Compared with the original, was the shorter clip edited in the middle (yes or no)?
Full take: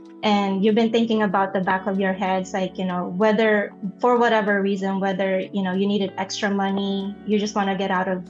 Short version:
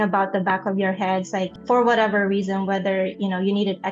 yes